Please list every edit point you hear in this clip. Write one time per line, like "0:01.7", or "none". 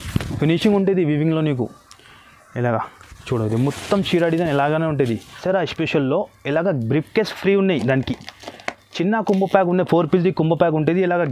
0:05.4